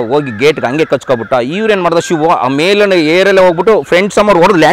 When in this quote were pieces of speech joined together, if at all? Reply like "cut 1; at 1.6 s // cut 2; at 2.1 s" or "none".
none